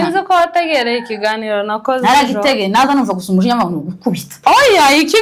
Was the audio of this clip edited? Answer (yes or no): no